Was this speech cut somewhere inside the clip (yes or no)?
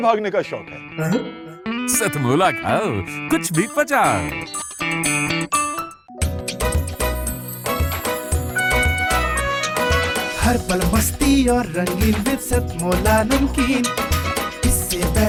no